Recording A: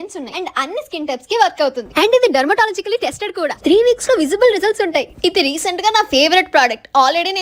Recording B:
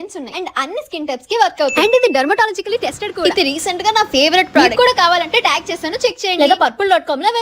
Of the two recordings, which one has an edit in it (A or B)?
B